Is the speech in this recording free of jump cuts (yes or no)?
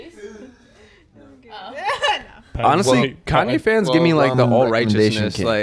no